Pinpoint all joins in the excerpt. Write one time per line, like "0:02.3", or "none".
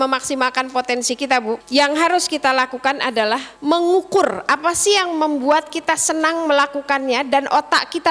0:01.6
0:03.5